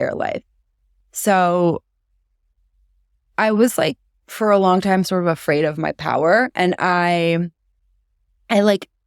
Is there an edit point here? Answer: no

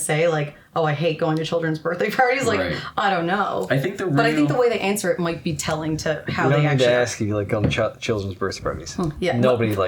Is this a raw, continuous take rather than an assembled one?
yes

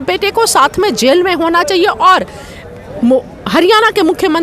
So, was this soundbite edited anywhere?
no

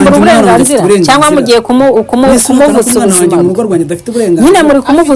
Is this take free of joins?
yes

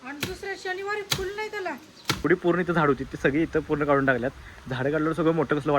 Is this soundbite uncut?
no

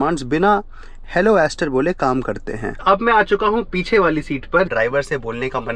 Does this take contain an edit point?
yes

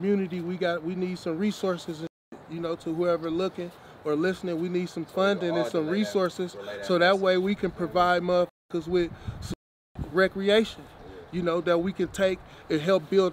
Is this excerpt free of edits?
yes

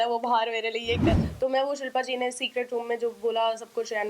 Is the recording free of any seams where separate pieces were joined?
no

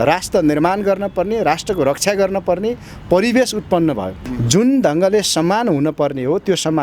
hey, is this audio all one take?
no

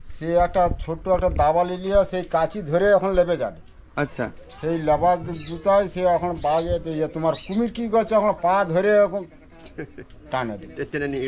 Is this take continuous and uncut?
yes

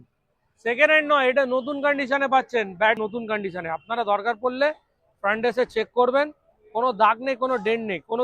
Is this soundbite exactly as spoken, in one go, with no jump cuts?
no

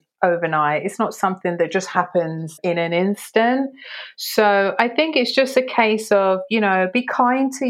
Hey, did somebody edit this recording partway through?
yes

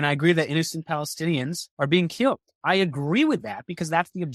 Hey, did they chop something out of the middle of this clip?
yes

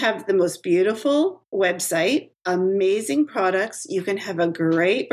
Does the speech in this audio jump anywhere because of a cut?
yes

